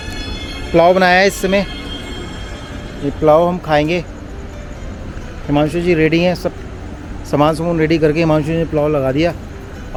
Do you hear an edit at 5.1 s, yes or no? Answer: no